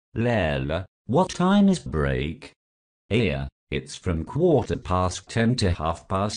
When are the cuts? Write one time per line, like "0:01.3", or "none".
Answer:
0:00.9